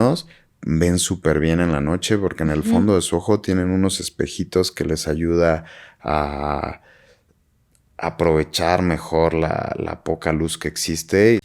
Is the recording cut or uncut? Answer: uncut